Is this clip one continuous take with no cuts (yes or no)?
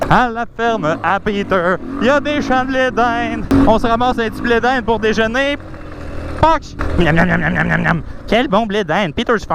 no